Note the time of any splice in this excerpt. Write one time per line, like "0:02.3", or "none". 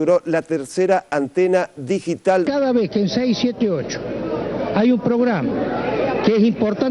0:02.5